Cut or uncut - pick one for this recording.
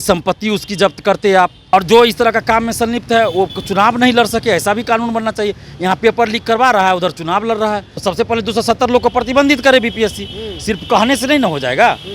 cut